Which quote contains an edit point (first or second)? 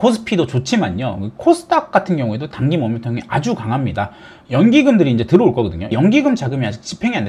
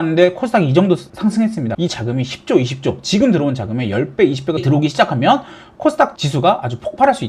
second